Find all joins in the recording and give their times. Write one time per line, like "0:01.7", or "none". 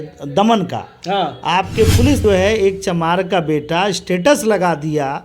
0:02.2